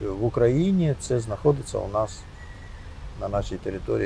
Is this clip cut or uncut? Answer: uncut